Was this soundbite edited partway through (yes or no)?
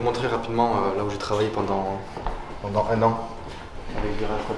no